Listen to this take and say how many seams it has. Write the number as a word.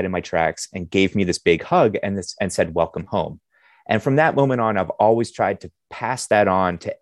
zero